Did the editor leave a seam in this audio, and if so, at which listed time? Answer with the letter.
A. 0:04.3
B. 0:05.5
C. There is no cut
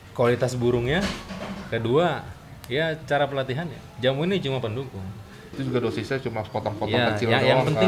B